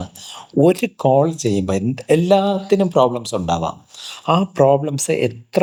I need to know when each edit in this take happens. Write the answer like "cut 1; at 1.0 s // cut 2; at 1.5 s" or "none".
none